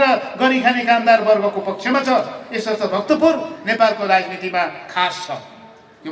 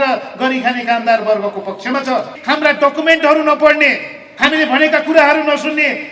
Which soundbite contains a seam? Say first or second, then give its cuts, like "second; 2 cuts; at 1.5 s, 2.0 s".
second; 1 cut; at 2.4 s